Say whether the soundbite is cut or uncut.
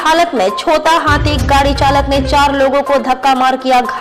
uncut